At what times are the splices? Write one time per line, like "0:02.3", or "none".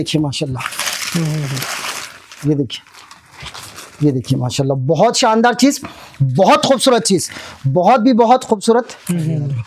none